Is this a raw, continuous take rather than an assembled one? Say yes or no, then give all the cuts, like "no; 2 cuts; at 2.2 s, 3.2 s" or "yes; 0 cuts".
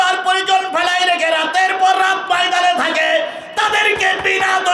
yes; 0 cuts